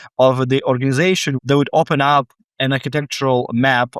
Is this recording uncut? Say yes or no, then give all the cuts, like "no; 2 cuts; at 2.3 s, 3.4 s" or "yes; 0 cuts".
no; 1 cut; at 1.3 s